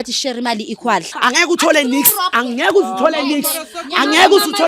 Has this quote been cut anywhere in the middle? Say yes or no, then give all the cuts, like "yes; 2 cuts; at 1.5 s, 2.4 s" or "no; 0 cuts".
yes; 2 cuts; at 1.1 s, 2.4 s